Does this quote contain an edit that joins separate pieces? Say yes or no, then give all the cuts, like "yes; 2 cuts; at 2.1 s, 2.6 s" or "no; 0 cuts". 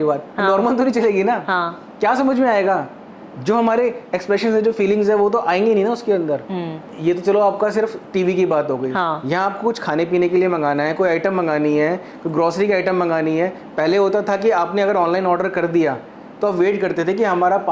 no; 0 cuts